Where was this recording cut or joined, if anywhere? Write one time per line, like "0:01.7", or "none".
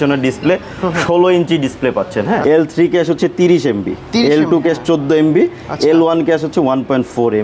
0:02.4